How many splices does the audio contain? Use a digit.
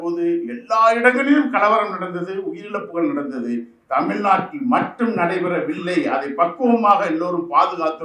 0